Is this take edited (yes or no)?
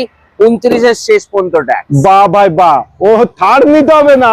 no